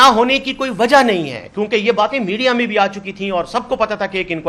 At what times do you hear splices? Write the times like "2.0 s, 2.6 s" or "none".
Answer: none